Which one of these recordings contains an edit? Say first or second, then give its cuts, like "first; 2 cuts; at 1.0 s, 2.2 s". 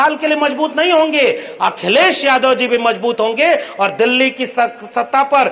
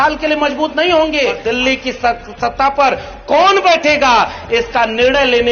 second; 1 cut; at 1.4 s